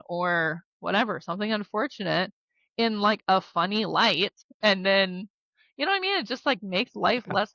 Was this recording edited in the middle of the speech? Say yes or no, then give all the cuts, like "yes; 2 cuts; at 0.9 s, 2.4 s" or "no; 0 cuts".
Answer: yes; 1 cut; at 4.4 s